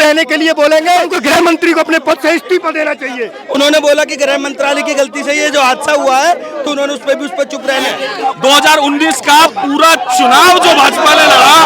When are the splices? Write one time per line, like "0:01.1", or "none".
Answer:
0:01.2
0:03.3
0:08.0